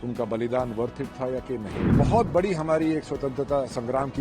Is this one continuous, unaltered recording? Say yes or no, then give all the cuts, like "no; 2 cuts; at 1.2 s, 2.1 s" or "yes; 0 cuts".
no; 1 cut; at 1.8 s